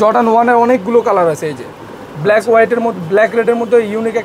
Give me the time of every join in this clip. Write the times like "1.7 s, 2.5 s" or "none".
none